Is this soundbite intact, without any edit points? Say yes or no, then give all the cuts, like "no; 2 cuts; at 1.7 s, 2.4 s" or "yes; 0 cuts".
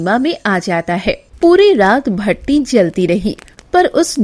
no; 1 cut; at 1.3 s